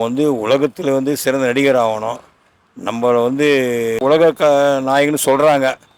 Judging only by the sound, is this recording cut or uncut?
cut